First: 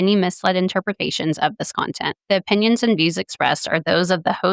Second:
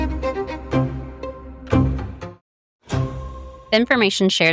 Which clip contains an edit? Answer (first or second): second